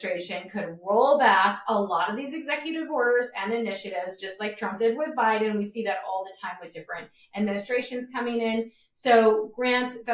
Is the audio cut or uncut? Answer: uncut